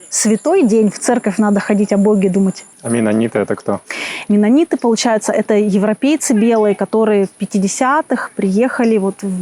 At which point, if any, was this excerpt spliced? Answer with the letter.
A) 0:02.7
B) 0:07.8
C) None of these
A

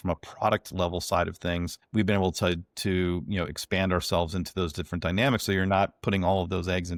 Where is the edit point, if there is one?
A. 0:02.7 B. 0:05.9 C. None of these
C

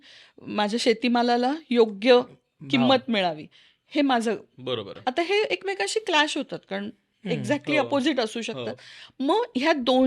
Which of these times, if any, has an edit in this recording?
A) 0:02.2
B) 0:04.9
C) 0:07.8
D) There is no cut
B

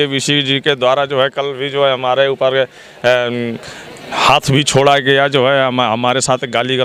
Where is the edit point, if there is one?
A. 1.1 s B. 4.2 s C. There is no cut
C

